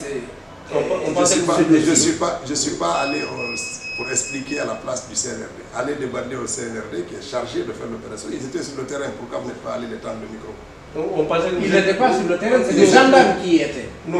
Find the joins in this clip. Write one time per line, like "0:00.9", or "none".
none